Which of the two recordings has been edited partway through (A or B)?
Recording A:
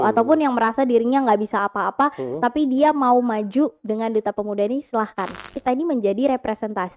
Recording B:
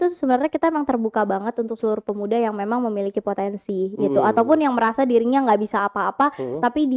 A